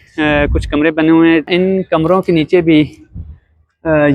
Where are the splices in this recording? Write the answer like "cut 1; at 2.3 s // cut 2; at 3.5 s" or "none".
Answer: cut 1; at 1.5 s